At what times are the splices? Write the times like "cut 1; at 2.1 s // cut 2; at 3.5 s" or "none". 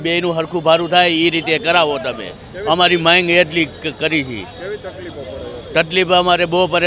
none